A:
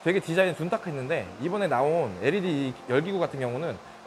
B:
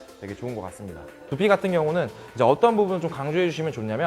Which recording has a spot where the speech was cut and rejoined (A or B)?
B